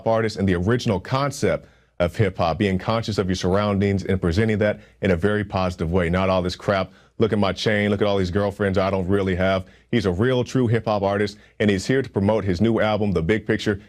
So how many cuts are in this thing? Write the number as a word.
zero